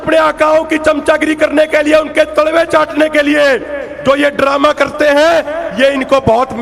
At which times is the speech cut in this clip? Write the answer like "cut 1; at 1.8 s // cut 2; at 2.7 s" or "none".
none

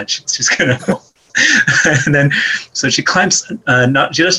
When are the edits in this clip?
none

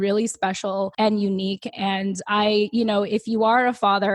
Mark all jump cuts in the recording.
cut 1; at 0.9 s

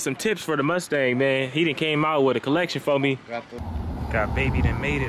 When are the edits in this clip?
cut 1; at 3.6 s

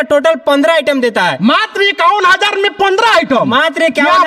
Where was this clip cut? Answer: none

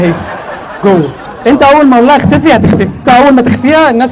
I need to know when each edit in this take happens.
cut 1; at 3.0 s

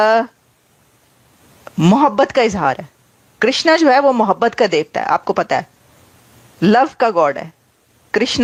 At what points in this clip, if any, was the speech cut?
none

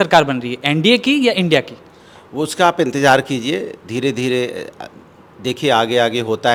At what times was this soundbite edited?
none

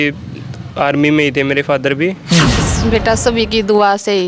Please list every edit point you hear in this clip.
cut 1; at 2.7 s

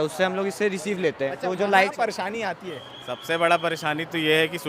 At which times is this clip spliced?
cut 1; at 1.9 s

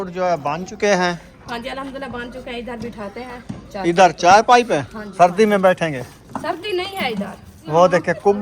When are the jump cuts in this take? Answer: cut 1; at 5.0 s // cut 2; at 7.5 s

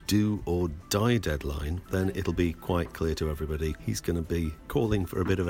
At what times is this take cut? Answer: cut 1; at 1.7 s // cut 2; at 3.8 s // cut 3; at 4.6 s

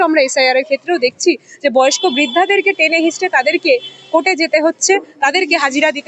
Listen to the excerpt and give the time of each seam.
none

